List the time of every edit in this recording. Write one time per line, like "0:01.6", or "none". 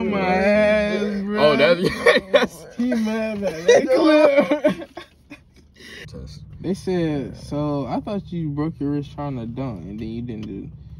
0:06.1